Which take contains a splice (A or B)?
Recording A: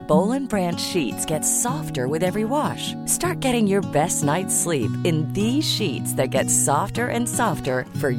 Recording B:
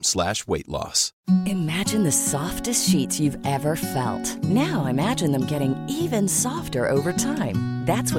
B